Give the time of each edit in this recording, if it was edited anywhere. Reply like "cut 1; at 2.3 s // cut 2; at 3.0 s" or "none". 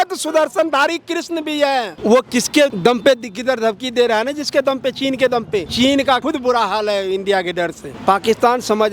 cut 1; at 1.9 s // cut 2; at 2.8 s // cut 3; at 5.7 s // cut 4; at 6.2 s // cut 5; at 7.9 s